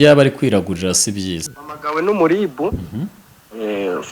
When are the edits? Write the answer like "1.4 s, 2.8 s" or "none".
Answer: 1.4 s